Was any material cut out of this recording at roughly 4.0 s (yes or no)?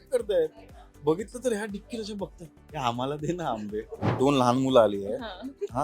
yes